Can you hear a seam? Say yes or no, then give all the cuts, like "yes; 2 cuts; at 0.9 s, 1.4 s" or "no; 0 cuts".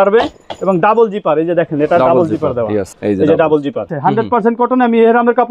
yes; 2 cuts; at 2.9 s, 3.9 s